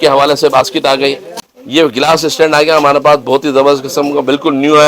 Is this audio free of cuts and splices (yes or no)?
no